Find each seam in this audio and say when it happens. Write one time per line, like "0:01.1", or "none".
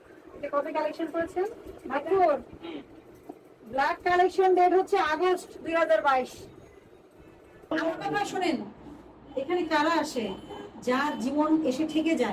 0:07.7

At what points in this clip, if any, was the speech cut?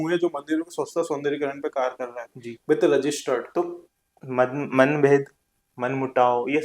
0:03.5

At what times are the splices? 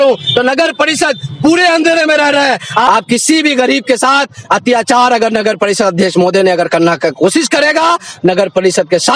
0:02.8

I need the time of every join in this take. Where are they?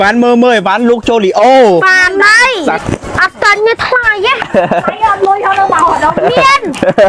none

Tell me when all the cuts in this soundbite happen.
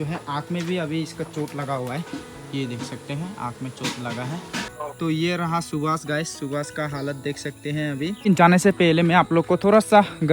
0:04.8
0:08.2

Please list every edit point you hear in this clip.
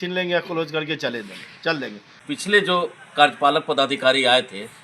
0:02.1

